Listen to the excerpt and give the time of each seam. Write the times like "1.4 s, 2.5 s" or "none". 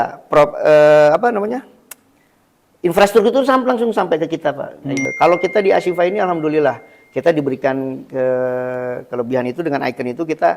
5.1 s